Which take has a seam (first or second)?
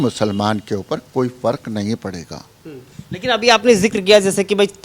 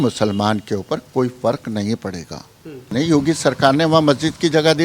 second